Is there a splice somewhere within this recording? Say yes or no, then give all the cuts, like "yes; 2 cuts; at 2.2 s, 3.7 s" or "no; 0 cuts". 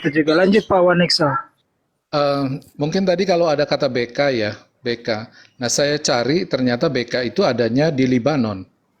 no; 0 cuts